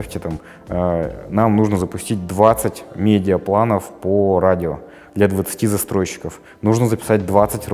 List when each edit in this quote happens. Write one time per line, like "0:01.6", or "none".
none